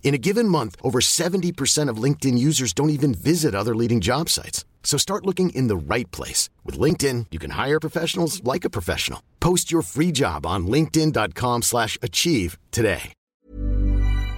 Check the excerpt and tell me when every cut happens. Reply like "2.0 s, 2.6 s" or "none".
13.4 s